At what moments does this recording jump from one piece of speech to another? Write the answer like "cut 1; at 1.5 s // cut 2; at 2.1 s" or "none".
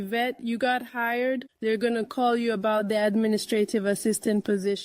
cut 1; at 1.5 s